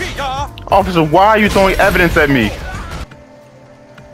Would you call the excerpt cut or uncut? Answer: cut